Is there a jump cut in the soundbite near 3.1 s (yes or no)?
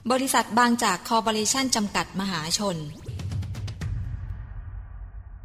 yes